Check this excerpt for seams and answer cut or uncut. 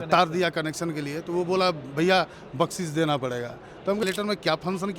cut